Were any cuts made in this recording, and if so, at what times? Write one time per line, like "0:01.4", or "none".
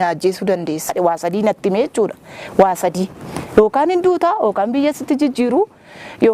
0:00.9

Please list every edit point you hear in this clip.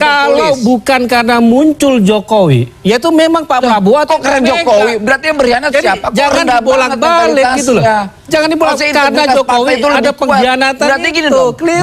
none

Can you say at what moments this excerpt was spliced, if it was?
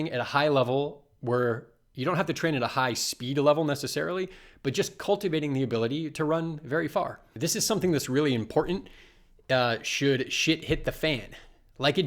0:07.2

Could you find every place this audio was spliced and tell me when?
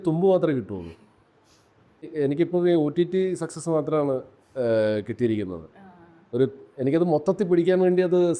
0:02.1

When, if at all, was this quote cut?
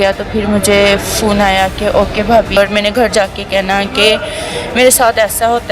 0:02.6

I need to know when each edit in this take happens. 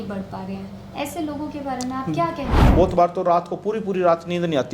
0:02.6

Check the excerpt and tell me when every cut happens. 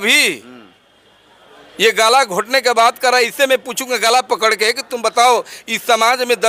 none

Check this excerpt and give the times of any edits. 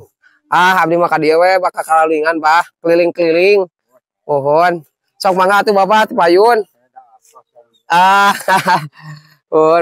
none

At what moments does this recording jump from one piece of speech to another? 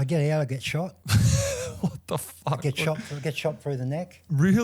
0:01.0

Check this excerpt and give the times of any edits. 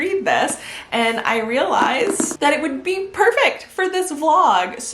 0:02.3

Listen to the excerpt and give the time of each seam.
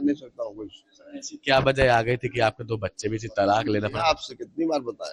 none

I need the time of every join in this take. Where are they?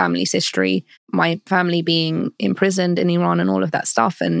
0:01.2

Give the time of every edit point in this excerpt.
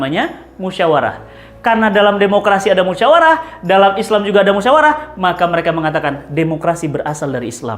none

